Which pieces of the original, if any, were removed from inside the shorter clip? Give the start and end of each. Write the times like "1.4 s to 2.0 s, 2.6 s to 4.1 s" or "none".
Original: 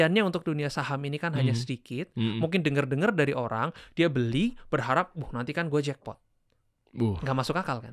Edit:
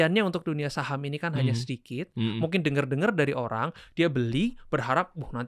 none